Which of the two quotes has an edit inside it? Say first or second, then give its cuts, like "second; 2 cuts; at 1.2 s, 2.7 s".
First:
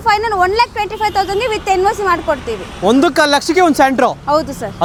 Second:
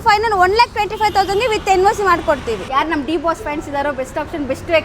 second; 1 cut; at 2.7 s